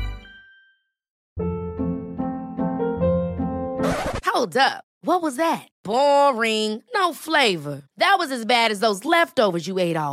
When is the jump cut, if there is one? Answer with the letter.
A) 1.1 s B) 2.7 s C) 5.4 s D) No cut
A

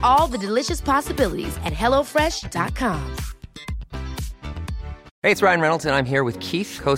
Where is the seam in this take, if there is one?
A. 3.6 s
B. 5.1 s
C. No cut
B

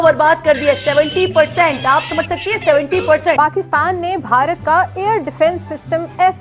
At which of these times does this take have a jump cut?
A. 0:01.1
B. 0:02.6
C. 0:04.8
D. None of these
D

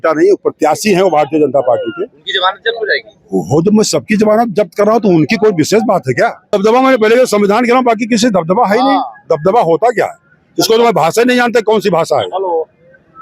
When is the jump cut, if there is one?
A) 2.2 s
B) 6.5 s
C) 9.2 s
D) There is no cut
B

